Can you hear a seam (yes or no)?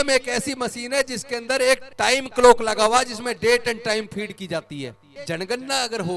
yes